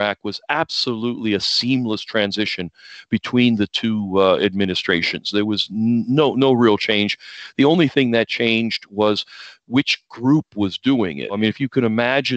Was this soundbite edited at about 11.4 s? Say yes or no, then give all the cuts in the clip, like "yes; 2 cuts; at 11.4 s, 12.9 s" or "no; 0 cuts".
yes; 1 cut; at 11.4 s